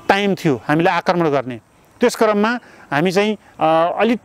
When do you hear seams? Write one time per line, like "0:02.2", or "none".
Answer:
none